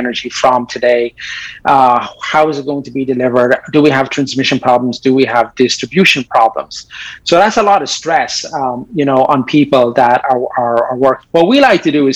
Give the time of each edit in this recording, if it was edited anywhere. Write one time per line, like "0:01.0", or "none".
0:11.2